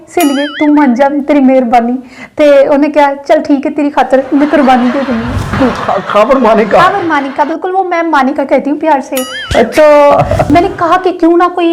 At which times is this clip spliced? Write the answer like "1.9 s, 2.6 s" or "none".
5.6 s, 10.5 s